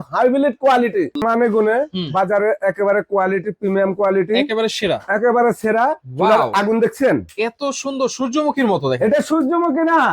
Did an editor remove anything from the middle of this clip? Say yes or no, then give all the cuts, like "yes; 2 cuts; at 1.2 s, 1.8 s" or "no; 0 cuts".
yes; 1 cut; at 6.0 s